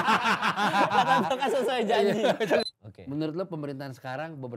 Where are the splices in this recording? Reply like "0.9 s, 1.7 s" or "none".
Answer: 2.6 s